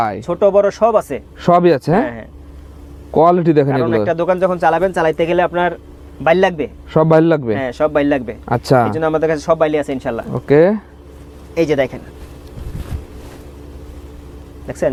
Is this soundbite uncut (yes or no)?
yes